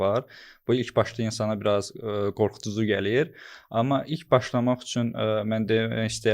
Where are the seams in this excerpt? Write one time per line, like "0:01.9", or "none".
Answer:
none